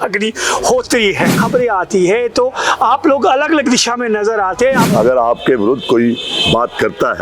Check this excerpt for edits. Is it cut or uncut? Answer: cut